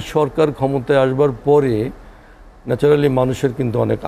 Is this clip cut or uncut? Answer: uncut